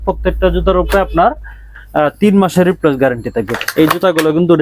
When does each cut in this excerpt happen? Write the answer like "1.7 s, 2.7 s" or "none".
3.6 s